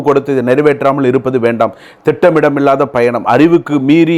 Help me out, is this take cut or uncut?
uncut